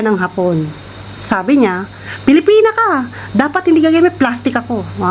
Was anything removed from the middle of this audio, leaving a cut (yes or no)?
no